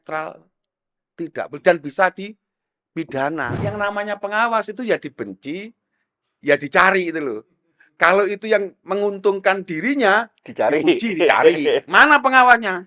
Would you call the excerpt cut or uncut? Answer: cut